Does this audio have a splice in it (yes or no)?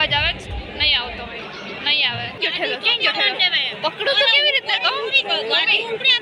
yes